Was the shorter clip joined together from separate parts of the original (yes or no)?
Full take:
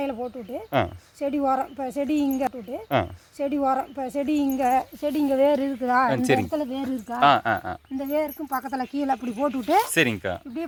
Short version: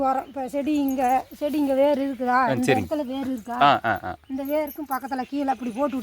yes